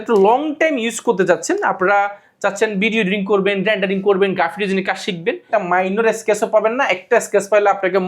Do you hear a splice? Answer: yes; 1 cut; at 5.5 s

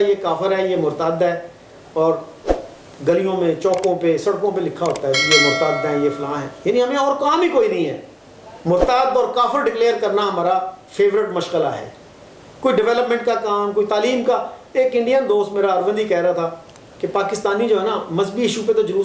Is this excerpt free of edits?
yes; 0 cuts

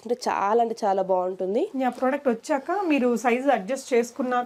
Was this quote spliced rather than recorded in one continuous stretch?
no; 0 cuts

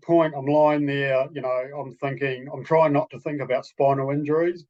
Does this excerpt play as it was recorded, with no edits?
yes; 0 cuts

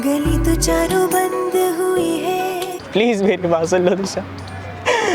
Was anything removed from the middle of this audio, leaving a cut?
yes; 1 cut; at 2.8 s

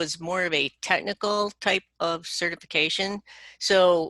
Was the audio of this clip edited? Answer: no; 0 cuts

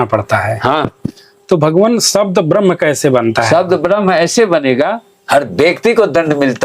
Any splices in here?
yes; 1 cut; at 5.1 s

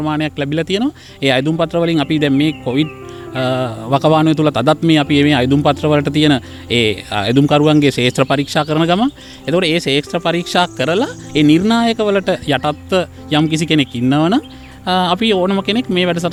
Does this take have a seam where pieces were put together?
no; 0 cuts

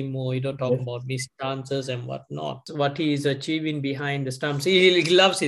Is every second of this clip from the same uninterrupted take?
no; 1 cut; at 2.6 s

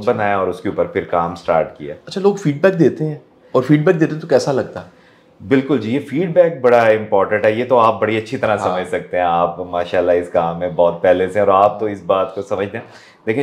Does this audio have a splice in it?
no; 0 cuts

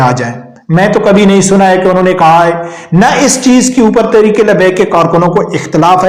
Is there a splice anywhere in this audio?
no; 0 cuts

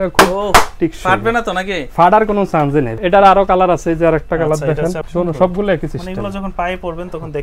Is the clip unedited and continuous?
no; 2 cuts; at 2.9 s, 5.0 s

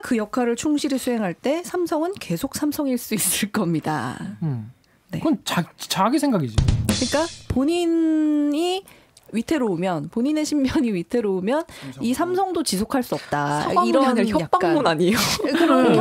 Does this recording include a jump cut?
no; 0 cuts

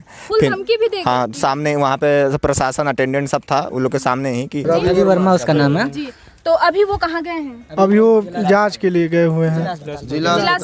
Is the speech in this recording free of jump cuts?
no; 1 cut; at 4.6 s

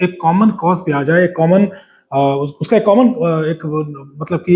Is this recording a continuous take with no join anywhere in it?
yes; 0 cuts

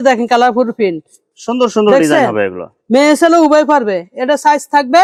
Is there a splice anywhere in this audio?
no; 0 cuts

